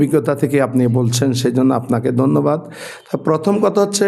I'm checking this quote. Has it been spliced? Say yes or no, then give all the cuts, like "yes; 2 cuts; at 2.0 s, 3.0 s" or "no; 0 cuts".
no; 0 cuts